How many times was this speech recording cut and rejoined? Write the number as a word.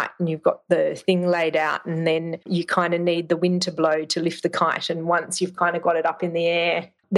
zero